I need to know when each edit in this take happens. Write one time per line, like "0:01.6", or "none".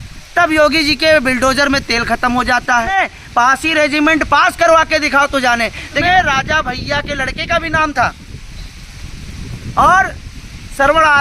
0:02.9
0:05.8